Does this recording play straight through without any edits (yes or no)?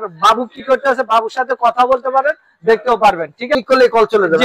no